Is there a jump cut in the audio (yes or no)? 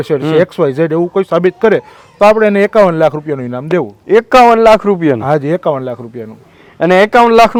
no